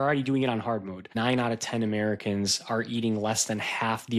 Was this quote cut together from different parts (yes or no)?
yes